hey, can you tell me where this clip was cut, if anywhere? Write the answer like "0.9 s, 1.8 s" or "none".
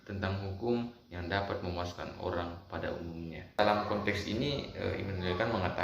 3.6 s